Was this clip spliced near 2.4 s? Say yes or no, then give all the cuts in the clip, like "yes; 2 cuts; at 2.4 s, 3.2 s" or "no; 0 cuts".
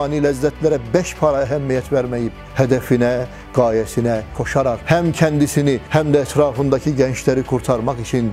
yes; 2 cuts; at 2.4 s, 4.5 s